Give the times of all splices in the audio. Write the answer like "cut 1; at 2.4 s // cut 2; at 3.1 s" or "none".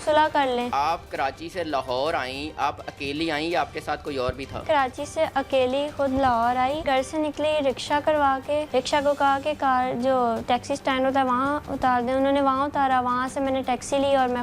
cut 1; at 0.7 s // cut 2; at 4.6 s // cut 3; at 6.8 s // cut 4; at 8.7 s